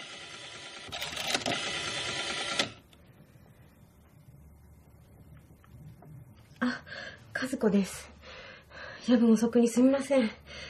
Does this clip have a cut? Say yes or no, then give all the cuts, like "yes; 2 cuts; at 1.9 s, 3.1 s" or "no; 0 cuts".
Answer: yes; 1 cut; at 4.0 s